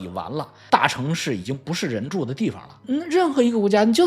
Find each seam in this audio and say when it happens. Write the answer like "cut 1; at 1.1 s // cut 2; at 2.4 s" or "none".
cut 1; at 2.8 s